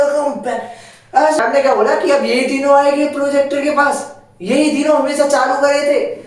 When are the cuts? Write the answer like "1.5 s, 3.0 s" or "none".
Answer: 1.4 s